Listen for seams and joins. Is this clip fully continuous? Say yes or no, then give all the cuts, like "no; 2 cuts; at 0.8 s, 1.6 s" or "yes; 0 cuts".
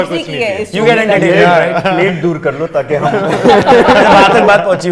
yes; 0 cuts